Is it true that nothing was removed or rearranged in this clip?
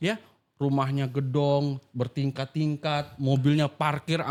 yes; 0 cuts

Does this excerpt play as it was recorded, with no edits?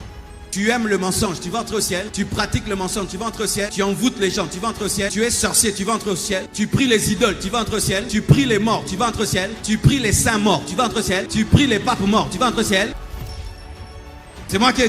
no; 7 cuts; at 2.1 s, 3.7 s, 5.1 s, 6.5 s, 8.0 s, 9.5 s, 11.3 s

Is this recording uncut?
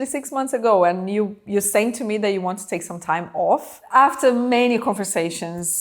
no; 1 cut; at 3.8 s

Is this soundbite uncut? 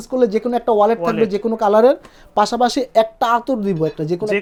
yes; 0 cuts

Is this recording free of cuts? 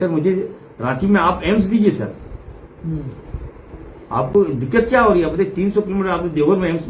yes; 0 cuts

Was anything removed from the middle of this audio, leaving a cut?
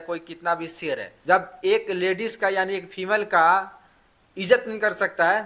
yes; 1 cut; at 1.1 s

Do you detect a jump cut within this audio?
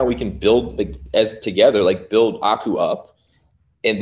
no; 0 cuts

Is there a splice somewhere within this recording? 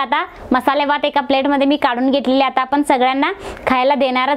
no; 0 cuts

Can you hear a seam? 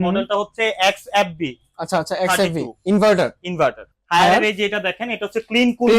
yes; 1 cut; at 3.9 s

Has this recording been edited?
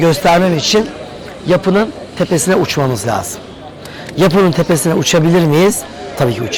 no; 0 cuts

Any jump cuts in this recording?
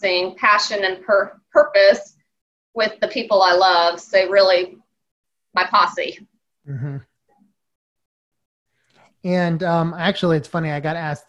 no; 0 cuts

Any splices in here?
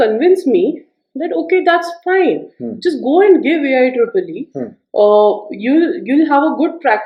no; 0 cuts

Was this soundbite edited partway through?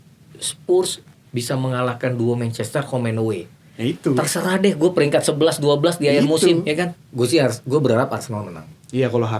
yes; 1 cut; at 7.0 s

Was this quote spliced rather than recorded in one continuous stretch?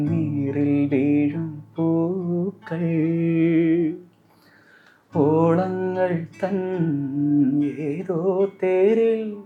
no; 0 cuts

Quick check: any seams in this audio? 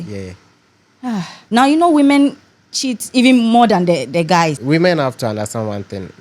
yes; 2 cuts; at 1.4 s, 4.6 s

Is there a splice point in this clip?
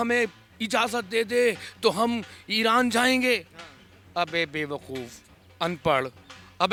no; 0 cuts

